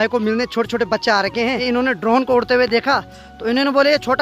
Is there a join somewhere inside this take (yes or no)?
yes